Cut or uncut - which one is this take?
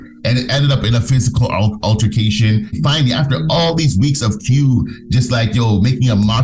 cut